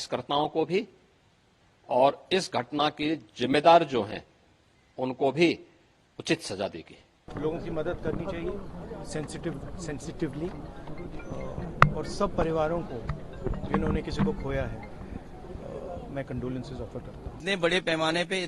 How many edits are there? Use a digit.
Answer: 2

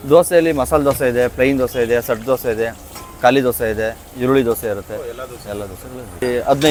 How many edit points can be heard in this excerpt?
0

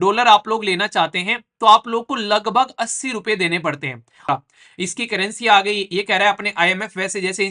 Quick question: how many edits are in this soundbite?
1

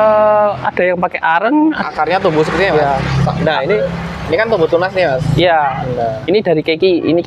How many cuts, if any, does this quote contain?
1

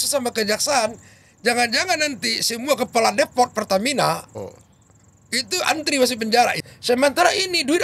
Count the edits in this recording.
1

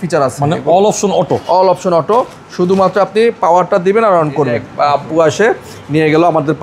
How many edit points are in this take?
1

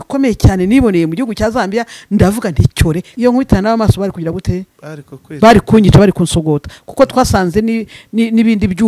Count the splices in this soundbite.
1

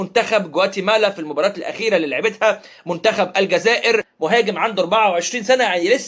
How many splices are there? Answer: 1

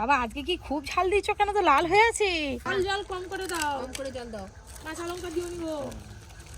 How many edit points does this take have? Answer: 1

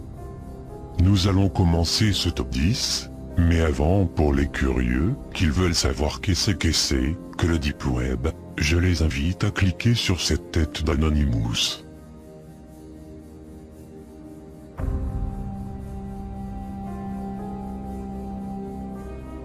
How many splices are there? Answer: 0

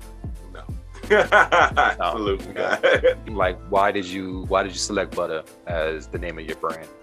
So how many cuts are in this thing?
1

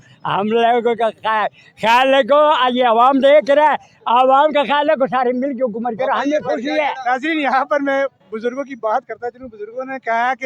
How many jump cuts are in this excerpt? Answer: 0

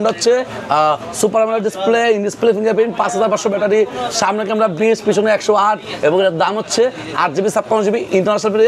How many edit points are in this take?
0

